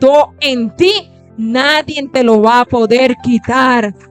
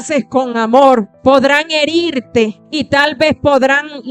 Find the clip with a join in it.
second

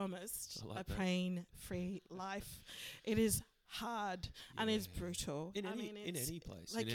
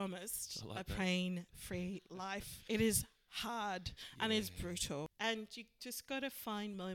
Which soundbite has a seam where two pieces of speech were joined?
second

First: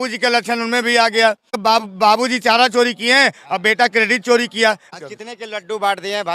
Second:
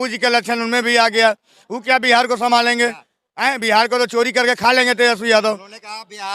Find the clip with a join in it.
first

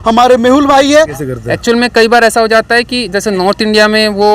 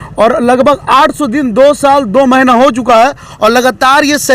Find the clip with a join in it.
first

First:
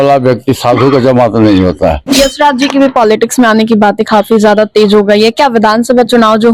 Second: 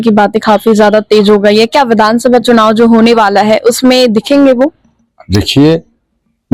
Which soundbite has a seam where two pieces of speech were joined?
first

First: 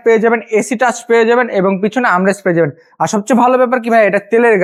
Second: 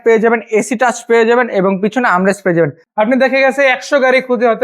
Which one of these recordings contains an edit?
second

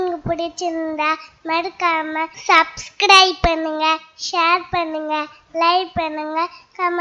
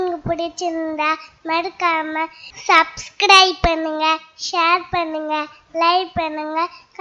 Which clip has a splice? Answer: first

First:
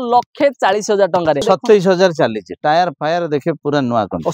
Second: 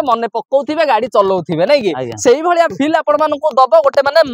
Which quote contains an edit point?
first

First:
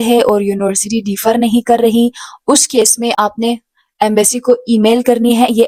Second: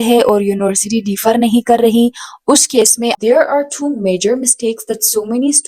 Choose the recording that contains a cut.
second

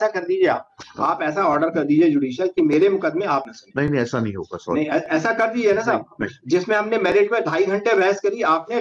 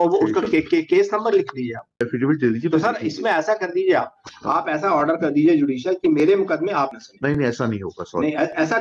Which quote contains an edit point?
second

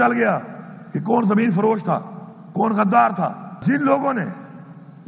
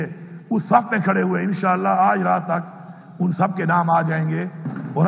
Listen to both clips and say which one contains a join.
first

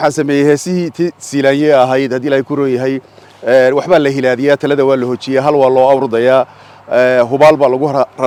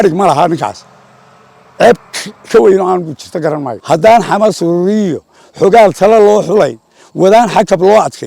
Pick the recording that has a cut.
second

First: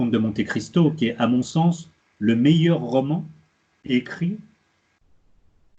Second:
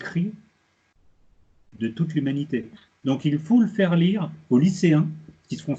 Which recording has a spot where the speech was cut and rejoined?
second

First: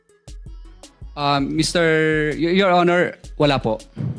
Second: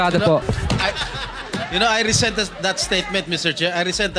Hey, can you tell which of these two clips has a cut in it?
first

